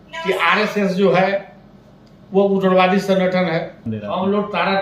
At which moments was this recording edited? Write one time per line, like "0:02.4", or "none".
0:03.8